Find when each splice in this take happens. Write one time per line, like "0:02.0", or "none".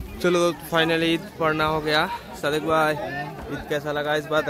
none